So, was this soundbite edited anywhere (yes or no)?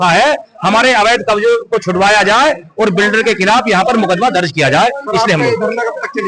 no